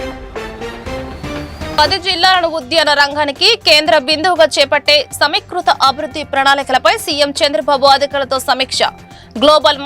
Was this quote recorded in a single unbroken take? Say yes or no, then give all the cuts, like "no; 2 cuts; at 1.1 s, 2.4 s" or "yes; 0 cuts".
no; 1 cut; at 1.7 s